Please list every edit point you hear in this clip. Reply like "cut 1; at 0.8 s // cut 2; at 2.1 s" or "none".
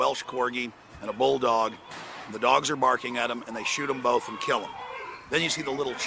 none

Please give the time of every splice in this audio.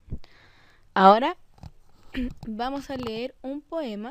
cut 1; at 1.2 s

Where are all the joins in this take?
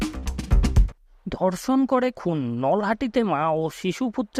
none

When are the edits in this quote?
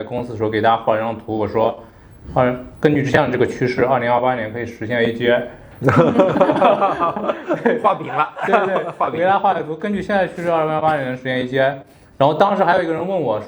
none

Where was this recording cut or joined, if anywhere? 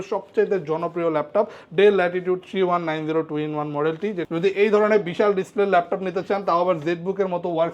cut 1; at 4.2 s

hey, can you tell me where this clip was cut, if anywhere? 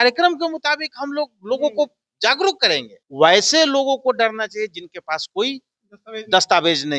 cut 1; at 3.0 s

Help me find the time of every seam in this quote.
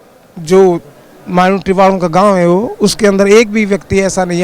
none

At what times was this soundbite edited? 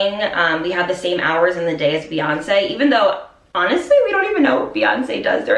none

